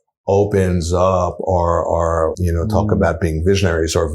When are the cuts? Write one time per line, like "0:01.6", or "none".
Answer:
0:02.4

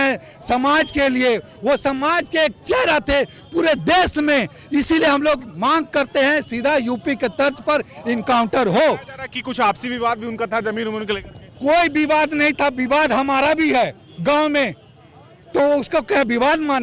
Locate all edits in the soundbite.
none

